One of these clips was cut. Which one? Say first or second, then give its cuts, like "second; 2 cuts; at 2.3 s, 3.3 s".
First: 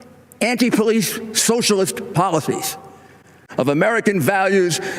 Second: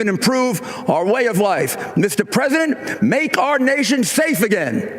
first; 1 cut; at 3.4 s